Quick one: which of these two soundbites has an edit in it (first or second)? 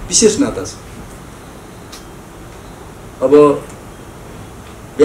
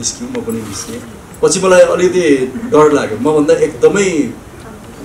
second